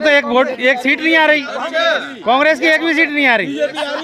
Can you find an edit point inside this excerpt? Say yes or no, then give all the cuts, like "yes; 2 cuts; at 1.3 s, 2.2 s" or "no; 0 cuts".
no; 0 cuts